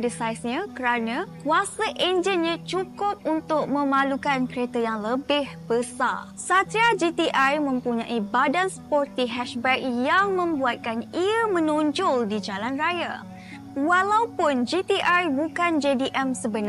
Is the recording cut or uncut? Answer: uncut